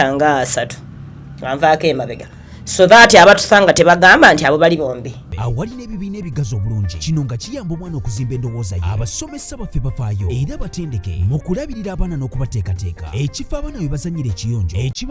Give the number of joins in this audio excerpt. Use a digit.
1